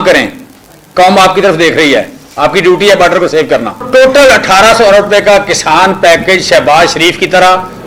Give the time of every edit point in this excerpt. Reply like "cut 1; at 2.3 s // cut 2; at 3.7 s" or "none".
cut 1; at 3.9 s